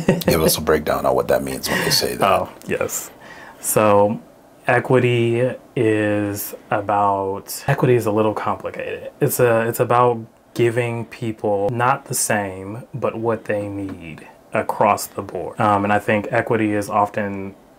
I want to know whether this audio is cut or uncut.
cut